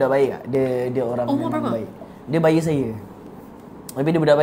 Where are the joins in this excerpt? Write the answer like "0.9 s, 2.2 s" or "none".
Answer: none